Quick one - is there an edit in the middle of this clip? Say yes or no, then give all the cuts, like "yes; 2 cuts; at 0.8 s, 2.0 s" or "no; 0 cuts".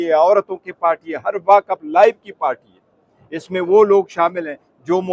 no; 0 cuts